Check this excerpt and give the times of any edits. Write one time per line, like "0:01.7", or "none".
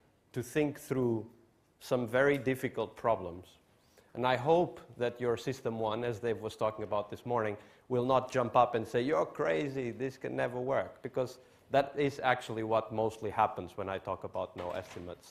none